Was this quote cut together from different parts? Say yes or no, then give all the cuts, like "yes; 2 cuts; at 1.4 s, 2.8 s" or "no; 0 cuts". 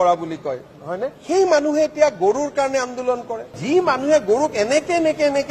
yes; 1 cut; at 3.6 s